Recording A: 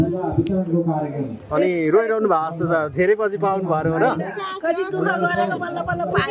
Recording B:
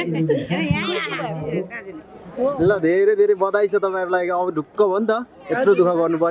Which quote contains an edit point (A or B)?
B